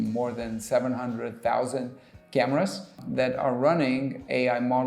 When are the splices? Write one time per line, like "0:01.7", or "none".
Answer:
0:03.0